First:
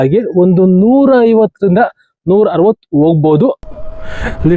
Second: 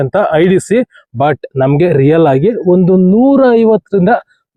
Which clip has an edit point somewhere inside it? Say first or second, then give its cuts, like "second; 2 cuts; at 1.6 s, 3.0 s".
first; 1 cut; at 3.6 s